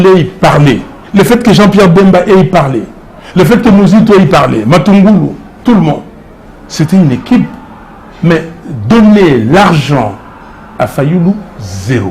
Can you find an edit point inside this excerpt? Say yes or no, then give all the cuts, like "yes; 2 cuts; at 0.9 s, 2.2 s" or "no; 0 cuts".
yes; 1 cut; at 0.9 s